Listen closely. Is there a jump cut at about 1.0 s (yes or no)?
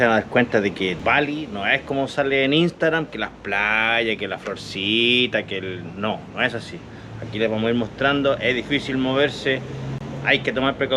yes